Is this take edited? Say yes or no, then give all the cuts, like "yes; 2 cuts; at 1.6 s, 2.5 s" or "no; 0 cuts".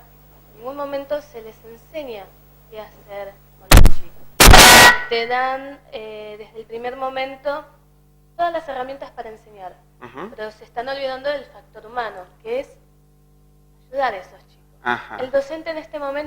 yes; 1 cut; at 8.8 s